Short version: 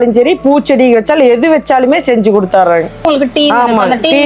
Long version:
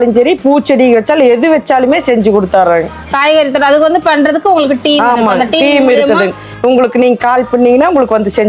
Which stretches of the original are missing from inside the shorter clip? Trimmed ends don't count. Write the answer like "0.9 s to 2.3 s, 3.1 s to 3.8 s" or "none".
3.1 s to 4.6 s